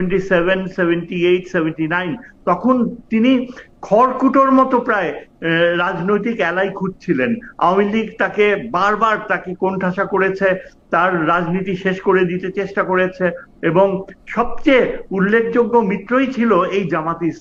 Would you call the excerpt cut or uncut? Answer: uncut